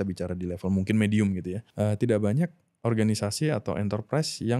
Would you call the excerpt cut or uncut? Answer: cut